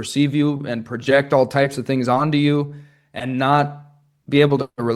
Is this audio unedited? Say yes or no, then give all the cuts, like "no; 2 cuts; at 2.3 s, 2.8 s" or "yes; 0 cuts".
yes; 0 cuts